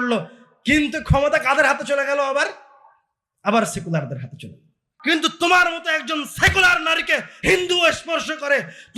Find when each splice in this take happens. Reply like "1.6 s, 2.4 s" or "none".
4.9 s